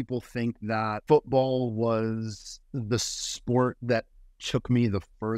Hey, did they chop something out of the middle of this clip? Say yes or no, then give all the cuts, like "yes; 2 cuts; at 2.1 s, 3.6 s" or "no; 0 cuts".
yes; 1 cut; at 1.0 s